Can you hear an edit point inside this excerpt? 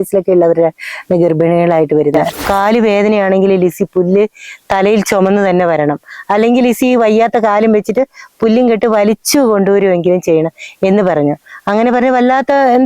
yes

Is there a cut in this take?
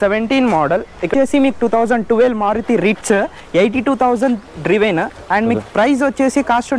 yes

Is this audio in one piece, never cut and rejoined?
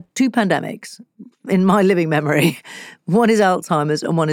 yes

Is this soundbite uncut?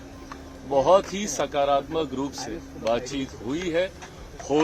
no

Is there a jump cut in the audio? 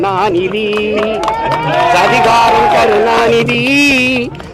no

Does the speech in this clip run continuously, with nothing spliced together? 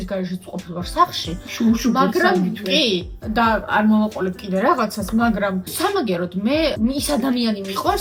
yes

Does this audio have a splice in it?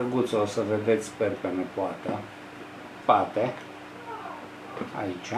yes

